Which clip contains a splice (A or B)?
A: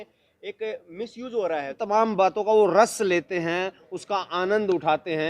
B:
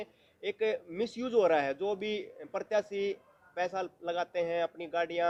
A